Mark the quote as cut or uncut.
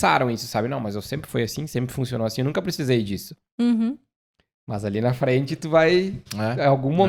uncut